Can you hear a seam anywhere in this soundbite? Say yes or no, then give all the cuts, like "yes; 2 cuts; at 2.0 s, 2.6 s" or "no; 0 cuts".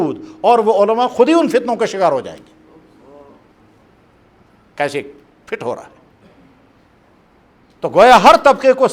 no; 0 cuts